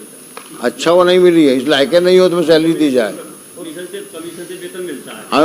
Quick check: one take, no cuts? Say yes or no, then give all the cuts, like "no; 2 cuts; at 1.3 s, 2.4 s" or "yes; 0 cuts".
no; 1 cut; at 3.7 s